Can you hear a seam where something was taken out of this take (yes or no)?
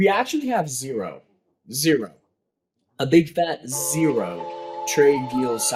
no